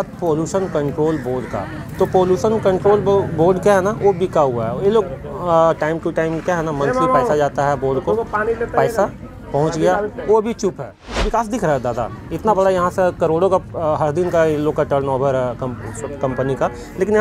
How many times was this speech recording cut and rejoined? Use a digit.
1